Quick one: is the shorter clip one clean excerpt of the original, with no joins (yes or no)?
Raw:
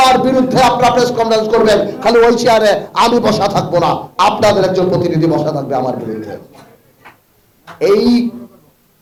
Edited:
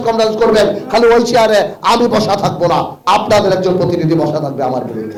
yes